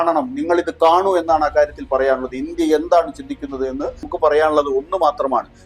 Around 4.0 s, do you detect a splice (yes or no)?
yes